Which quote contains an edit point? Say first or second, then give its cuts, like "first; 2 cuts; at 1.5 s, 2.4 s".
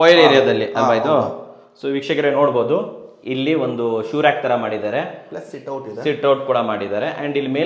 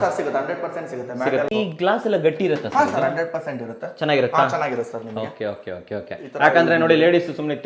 second; 1 cut; at 1.5 s